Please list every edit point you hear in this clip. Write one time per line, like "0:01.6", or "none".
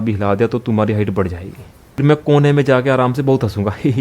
0:02.0

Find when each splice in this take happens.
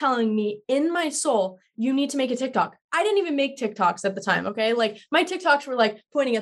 none

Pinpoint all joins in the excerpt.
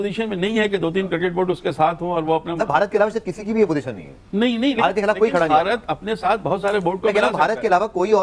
none

